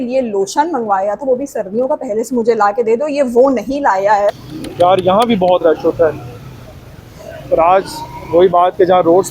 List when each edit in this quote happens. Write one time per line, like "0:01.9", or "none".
0:04.4